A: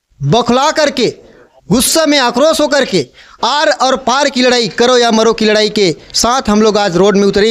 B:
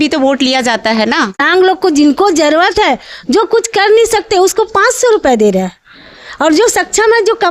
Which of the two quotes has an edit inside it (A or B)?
B